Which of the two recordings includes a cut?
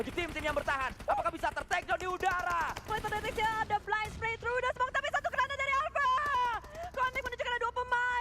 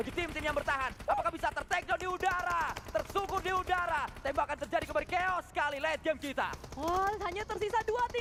first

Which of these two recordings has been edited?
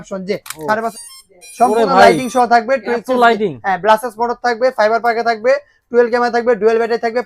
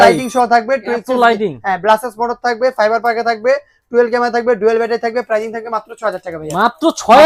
first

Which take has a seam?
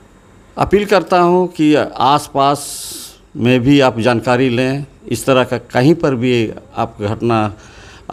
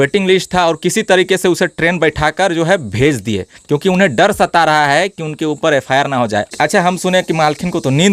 second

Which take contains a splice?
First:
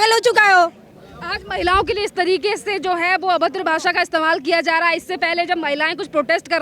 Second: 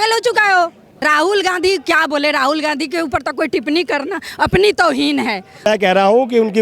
second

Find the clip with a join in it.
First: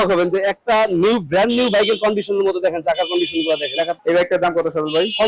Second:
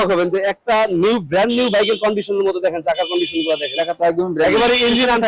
first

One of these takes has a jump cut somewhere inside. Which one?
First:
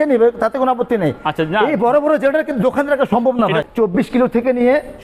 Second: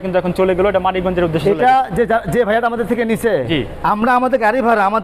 first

